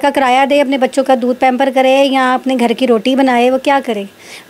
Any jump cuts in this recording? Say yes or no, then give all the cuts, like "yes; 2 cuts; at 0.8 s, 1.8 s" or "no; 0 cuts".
no; 0 cuts